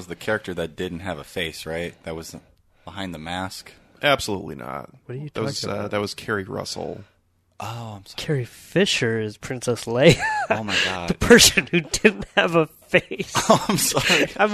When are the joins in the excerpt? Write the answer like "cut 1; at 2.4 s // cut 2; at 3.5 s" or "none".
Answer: cut 1; at 3.9 s